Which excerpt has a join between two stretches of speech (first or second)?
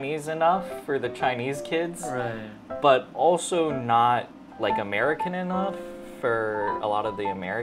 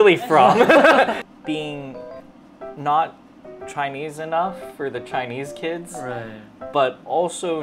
second